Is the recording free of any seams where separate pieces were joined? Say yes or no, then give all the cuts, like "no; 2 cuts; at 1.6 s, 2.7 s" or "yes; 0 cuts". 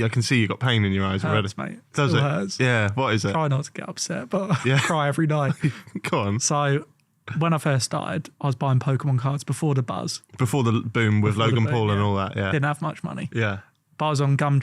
yes; 0 cuts